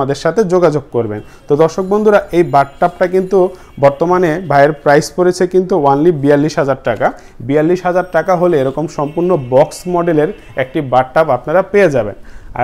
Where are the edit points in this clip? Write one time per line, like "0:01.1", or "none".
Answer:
none